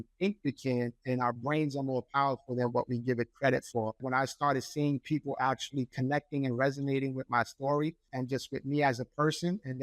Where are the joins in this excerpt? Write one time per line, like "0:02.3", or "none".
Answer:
0:04.0
0:08.1